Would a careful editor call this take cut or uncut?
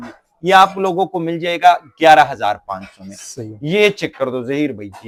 uncut